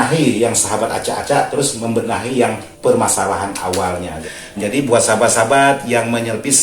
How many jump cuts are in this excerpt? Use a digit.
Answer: 2